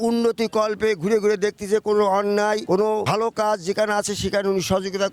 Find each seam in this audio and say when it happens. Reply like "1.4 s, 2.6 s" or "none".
2.8 s